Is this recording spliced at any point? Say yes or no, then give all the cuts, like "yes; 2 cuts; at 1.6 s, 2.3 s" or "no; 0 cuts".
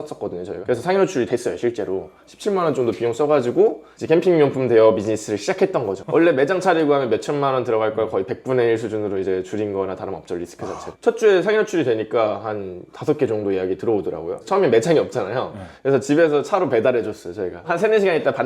no; 0 cuts